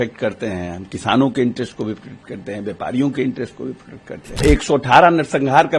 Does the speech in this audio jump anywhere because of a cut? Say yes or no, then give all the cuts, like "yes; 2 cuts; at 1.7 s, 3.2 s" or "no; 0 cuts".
yes; 1 cut; at 4.4 s